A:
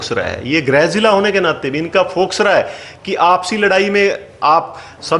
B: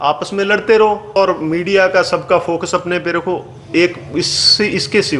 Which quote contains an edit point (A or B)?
B